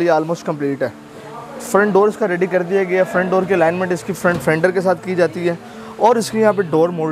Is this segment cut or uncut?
uncut